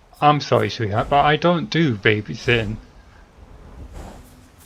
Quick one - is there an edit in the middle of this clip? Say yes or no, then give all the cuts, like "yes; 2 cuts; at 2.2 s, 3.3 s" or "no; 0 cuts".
no; 0 cuts